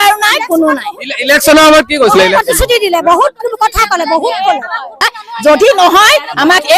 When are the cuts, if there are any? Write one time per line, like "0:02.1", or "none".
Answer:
0:05.2